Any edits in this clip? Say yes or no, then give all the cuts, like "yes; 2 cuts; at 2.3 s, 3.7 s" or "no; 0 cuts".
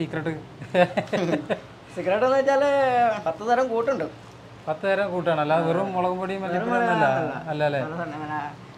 no; 0 cuts